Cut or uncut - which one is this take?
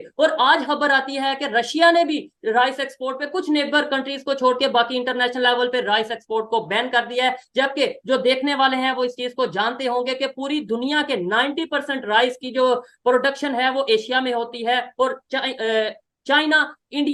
uncut